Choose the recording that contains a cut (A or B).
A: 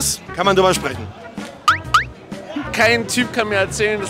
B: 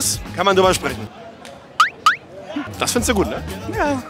A